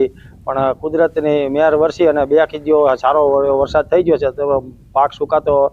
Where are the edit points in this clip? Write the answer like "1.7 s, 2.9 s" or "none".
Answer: 2.1 s